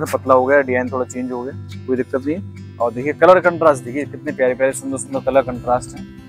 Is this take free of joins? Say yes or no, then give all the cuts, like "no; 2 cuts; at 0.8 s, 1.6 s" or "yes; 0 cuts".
yes; 0 cuts